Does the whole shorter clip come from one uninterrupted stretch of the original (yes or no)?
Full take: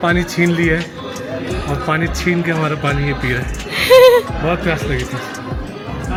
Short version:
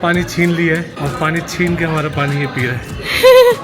no